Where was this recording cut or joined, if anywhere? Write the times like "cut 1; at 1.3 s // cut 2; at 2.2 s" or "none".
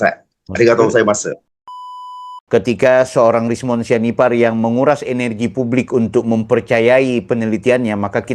cut 1; at 2.0 s